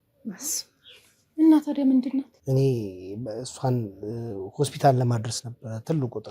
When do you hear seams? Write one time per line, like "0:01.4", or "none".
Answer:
0:02.4